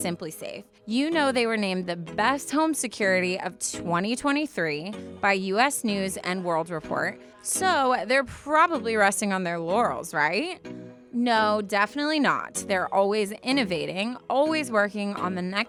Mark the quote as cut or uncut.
uncut